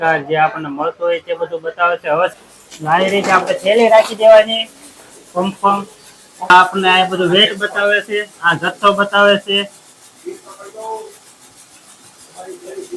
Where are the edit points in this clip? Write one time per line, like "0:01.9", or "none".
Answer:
0:02.3
0:06.5